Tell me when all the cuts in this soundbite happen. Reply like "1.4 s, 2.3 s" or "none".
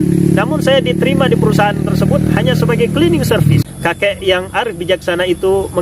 3.6 s